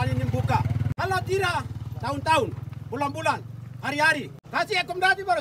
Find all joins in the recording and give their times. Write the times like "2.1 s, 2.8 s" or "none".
0.9 s, 4.4 s